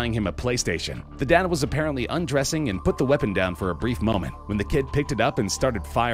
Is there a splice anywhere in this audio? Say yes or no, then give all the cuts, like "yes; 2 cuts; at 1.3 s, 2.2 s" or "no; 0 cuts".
no; 0 cuts